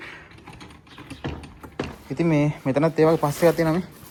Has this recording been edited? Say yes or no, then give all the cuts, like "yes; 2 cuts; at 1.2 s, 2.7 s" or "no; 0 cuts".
no; 0 cuts